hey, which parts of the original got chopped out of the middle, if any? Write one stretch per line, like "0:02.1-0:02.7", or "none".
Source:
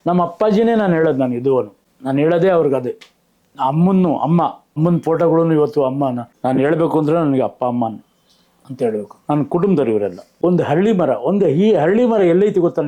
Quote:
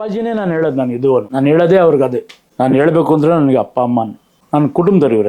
0:01.7-0:02.0
0:03.1-0:06.3
0:08.2-0:09.1